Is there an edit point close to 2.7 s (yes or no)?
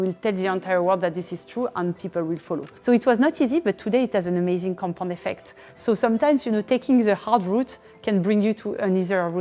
yes